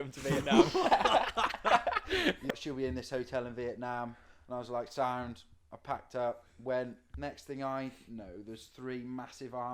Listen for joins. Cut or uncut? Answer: cut